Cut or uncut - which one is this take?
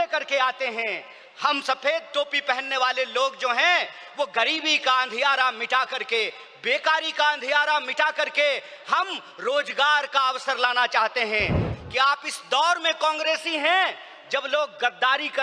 cut